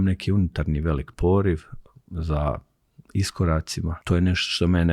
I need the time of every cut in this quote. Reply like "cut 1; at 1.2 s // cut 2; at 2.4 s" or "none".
cut 1; at 4.0 s